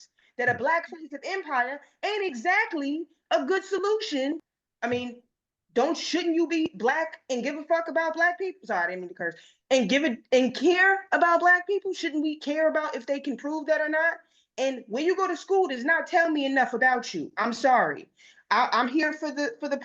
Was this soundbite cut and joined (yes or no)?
yes